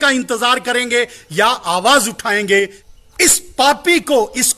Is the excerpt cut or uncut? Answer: cut